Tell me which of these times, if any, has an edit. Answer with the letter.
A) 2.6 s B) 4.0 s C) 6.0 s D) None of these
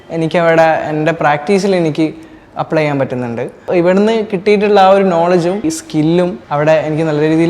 C